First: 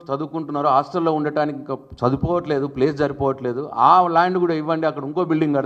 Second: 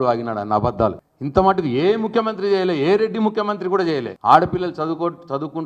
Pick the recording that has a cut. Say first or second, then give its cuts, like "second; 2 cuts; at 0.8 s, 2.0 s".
second; 2 cuts; at 1.1 s, 4.1 s